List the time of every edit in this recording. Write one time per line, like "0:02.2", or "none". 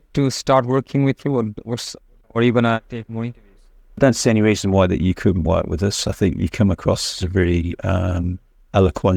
none